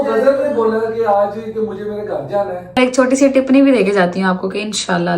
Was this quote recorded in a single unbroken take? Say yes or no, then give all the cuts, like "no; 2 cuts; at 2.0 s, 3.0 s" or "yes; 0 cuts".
no; 1 cut; at 2.8 s